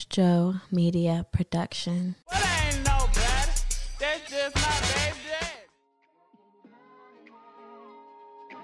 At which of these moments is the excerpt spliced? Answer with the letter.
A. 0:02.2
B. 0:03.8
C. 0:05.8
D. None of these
A